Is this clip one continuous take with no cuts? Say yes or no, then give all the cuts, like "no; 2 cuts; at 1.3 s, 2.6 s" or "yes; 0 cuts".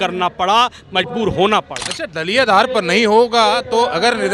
yes; 0 cuts